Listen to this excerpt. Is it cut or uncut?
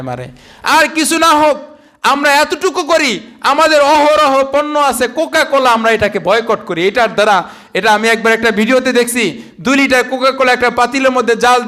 uncut